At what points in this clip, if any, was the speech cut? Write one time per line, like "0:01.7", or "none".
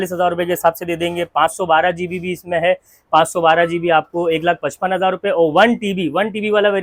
none